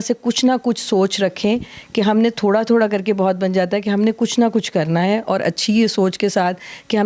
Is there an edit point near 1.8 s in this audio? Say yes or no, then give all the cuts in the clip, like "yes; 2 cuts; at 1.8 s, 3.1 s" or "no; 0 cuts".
no; 0 cuts